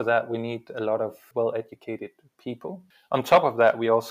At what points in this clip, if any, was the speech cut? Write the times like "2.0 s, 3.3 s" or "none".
2.9 s